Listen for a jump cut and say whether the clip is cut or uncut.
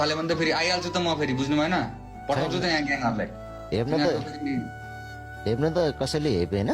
uncut